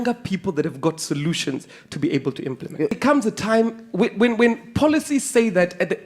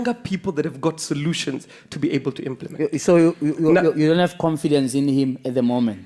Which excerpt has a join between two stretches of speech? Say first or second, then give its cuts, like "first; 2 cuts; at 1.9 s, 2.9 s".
first; 1 cut; at 3.0 s